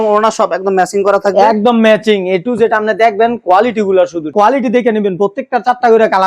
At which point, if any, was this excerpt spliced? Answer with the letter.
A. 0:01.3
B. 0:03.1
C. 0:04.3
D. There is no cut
C